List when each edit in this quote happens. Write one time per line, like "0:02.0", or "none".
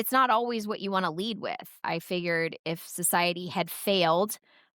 0:01.7